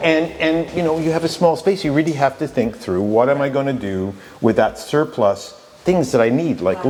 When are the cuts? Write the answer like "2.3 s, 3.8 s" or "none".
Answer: none